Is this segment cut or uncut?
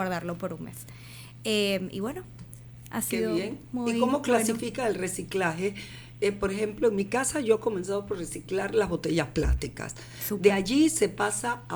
uncut